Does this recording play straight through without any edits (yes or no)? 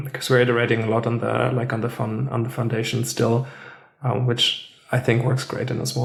yes